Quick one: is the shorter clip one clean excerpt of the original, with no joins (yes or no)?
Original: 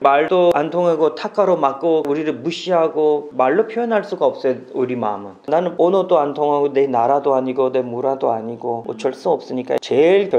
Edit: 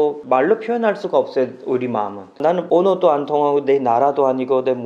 yes